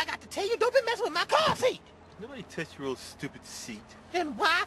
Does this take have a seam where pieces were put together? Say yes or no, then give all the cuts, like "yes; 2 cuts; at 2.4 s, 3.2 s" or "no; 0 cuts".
no; 0 cuts